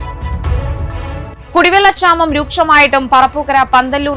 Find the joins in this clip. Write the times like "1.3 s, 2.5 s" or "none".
1.3 s

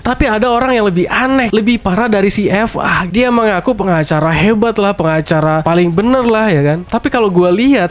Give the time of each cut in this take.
1.5 s, 3.0 s, 5.6 s

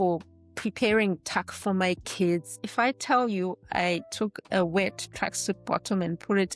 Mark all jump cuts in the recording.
2.5 s

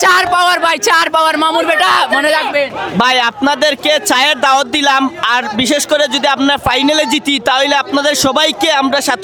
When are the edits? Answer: none

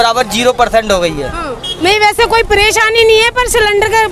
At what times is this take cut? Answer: 1.7 s

